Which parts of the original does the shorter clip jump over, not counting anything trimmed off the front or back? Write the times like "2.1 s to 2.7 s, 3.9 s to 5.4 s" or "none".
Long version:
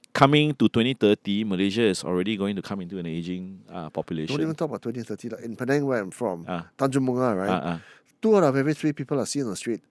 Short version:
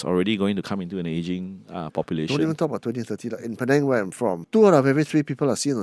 6.4 s to 8.1 s